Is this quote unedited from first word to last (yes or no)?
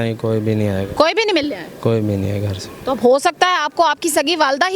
yes